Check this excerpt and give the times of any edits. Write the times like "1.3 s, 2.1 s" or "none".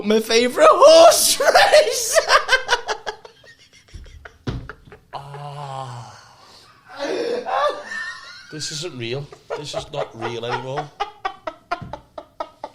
none